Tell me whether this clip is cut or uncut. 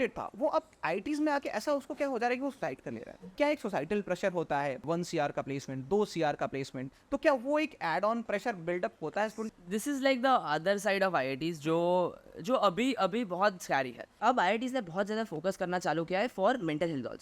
cut